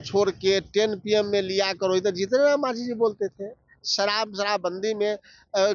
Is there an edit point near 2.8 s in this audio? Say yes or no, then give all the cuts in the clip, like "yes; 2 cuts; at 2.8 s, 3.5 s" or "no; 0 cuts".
no; 0 cuts